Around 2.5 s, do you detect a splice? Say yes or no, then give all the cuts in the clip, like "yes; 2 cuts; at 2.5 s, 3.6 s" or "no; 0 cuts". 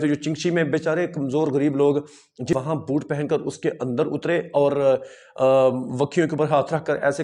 yes; 1 cut; at 2.5 s